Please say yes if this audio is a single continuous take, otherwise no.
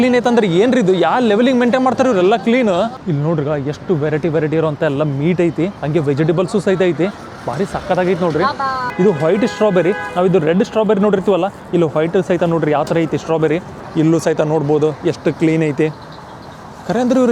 no